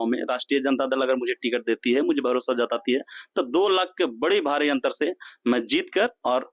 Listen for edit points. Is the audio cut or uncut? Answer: uncut